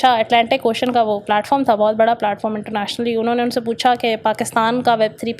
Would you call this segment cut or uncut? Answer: uncut